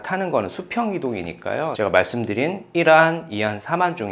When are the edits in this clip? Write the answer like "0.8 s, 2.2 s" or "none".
1.7 s